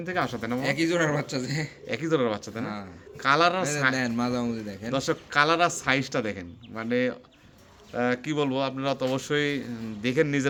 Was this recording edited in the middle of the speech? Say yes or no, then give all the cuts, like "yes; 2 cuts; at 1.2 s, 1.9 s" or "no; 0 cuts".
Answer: no; 0 cuts